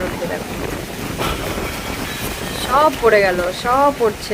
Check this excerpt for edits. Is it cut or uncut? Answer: uncut